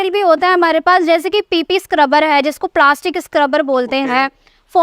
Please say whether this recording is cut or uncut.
uncut